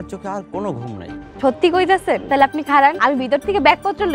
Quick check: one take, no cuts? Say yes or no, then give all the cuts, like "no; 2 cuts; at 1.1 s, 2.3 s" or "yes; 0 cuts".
no; 3 cuts; at 1.2 s, 2.2 s, 3.0 s